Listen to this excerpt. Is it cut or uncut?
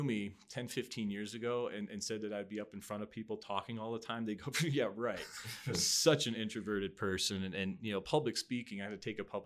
uncut